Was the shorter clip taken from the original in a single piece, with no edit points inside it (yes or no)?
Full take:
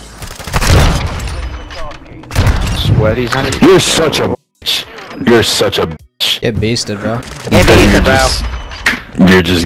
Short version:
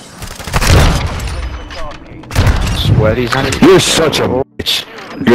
yes